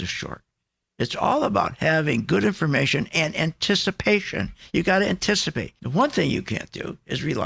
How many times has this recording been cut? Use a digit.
0